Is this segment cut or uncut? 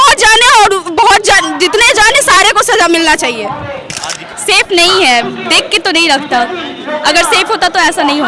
cut